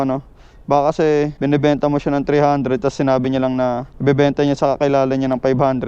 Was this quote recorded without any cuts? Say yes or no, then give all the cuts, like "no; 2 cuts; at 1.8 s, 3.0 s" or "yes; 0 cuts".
no; 2 cuts; at 1.3 s, 3.9 s